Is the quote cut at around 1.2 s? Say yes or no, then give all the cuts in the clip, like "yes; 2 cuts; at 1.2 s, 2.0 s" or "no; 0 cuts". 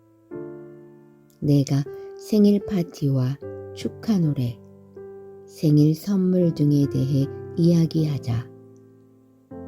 yes; 1 cut; at 1.2 s